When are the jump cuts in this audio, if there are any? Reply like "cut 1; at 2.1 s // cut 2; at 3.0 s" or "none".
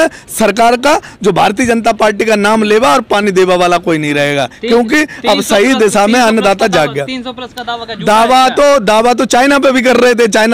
none